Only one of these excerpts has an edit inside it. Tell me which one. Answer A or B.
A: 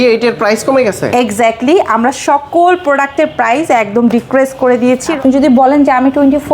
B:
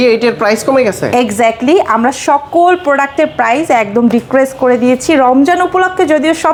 A